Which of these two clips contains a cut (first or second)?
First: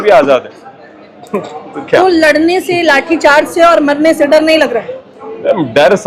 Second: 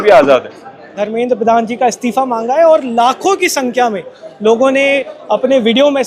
second